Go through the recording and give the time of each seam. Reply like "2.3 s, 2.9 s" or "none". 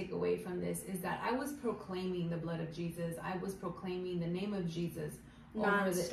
none